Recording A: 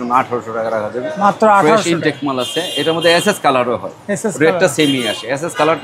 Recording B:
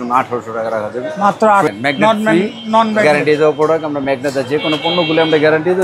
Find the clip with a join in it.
B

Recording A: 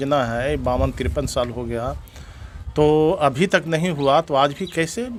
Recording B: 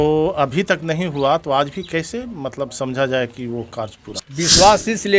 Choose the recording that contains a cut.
B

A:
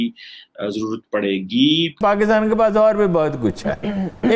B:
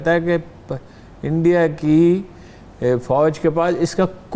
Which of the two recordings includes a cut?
A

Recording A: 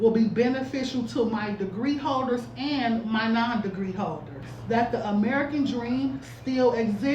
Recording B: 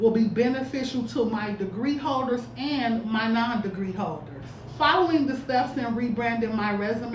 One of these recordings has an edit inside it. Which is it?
A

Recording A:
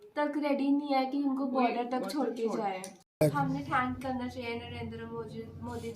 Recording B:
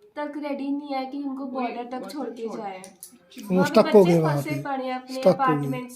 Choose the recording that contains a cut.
A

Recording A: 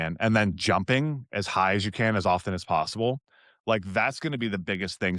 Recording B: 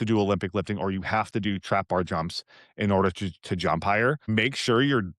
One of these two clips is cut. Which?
B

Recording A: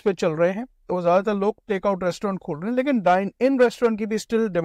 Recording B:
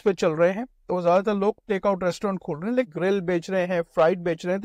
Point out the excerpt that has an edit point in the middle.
B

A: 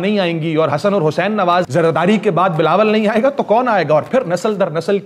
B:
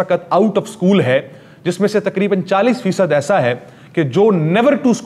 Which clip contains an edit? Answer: A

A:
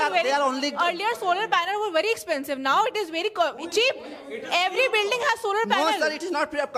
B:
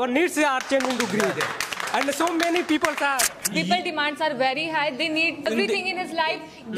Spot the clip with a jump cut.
B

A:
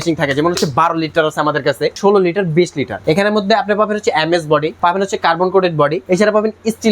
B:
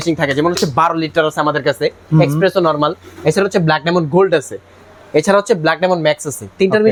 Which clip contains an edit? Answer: A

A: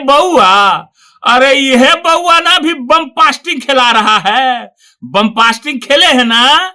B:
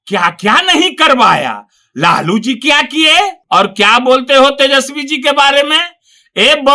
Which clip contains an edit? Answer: B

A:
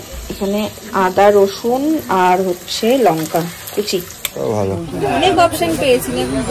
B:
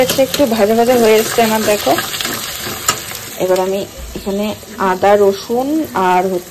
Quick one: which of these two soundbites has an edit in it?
A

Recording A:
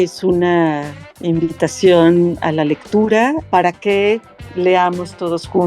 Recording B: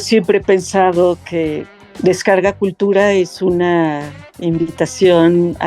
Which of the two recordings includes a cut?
A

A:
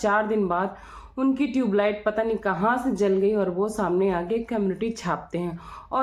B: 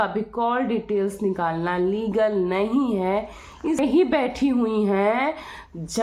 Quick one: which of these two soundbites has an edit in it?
B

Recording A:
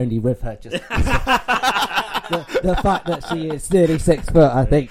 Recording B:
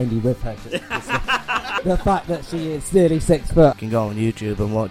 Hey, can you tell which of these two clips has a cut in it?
B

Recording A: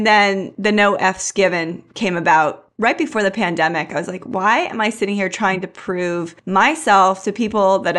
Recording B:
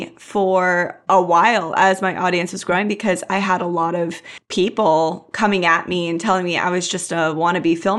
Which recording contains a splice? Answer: A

